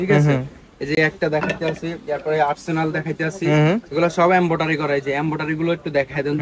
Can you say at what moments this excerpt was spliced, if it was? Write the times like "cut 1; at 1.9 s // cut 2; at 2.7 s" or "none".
none